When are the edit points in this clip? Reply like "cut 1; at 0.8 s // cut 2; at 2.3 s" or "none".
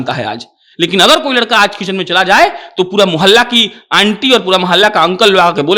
none